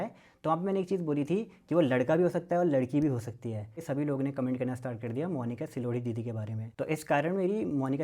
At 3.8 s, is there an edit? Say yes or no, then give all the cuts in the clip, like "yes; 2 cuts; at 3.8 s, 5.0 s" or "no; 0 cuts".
yes; 2 cuts; at 3.8 s, 6.6 s